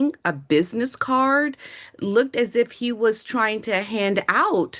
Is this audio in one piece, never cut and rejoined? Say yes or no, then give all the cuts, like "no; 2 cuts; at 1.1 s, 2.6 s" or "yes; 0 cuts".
yes; 0 cuts